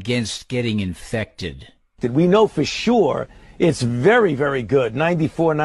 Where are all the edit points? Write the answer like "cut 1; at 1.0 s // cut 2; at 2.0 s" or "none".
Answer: none